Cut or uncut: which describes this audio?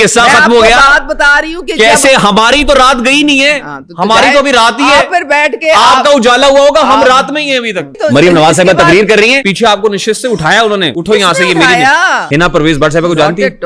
cut